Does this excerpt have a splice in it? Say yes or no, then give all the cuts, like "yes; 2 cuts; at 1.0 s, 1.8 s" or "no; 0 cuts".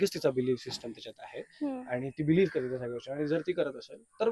no; 0 cuts